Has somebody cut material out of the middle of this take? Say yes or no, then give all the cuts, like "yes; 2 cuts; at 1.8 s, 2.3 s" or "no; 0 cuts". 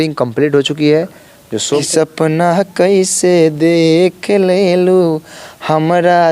yes; 1 cut; at 1.6 s